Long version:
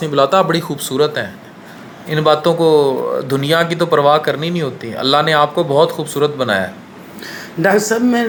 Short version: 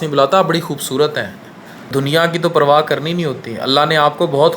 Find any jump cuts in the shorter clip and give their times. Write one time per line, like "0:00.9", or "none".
0:01.9